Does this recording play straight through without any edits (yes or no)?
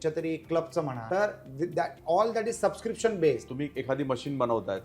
no